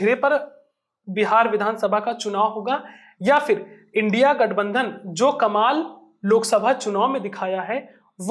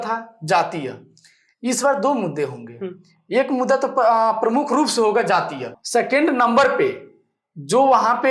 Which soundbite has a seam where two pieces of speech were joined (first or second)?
second